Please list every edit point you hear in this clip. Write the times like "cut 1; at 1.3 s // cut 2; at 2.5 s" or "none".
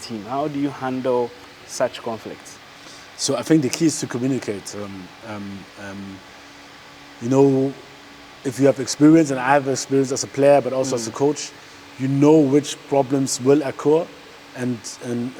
none